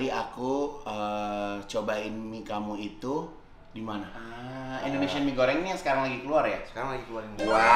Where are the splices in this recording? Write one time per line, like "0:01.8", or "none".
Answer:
0:04.3

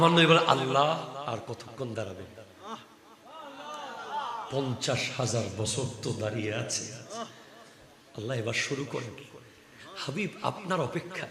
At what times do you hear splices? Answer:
0:01.2

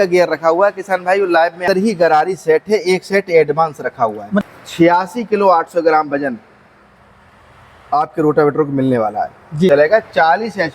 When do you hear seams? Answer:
0:01.6
0:04.4
0:09.7

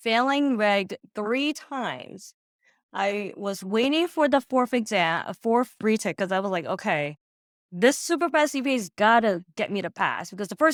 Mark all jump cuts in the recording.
none

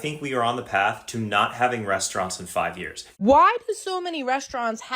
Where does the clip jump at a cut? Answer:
0:03.0

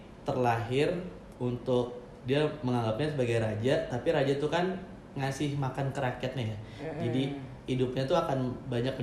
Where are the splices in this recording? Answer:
none

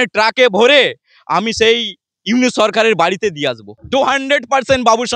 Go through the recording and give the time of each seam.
0:03.7

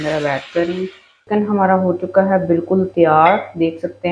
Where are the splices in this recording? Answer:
0:01.2

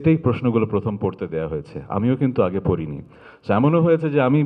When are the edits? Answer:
none

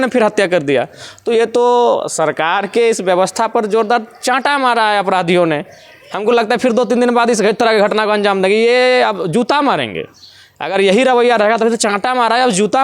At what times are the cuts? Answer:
none

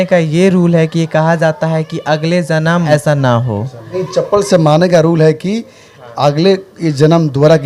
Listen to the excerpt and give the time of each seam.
0:02.9
0:03.9

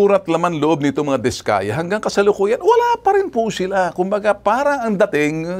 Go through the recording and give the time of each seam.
none

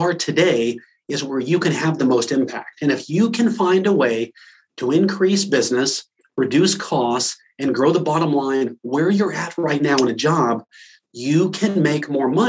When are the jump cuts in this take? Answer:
none

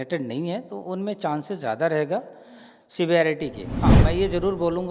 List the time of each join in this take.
0:04.0

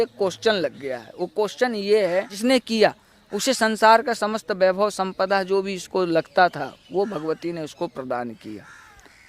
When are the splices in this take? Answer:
0:02.3

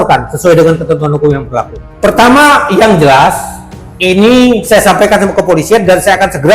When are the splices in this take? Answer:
0:01.8

